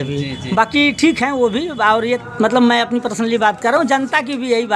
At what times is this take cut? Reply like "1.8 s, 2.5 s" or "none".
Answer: 2.0 s